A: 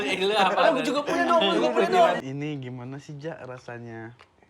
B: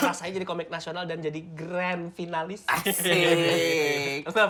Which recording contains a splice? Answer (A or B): A